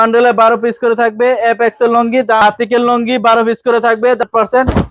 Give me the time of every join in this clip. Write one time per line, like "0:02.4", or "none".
0:02.4
0:04.2